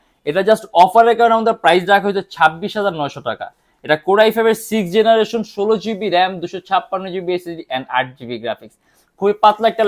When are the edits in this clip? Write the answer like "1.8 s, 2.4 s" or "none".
none